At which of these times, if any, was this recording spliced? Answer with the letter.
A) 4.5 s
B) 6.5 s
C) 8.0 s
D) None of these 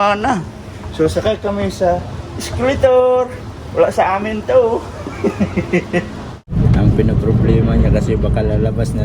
B